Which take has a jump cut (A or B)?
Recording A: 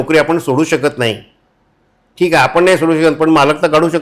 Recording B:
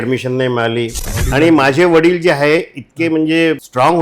B